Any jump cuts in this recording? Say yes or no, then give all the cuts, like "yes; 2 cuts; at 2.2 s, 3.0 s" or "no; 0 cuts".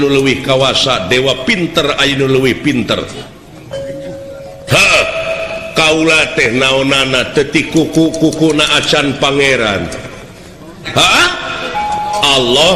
no; 0 cuts